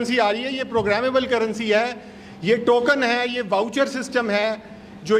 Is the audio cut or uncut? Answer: uncut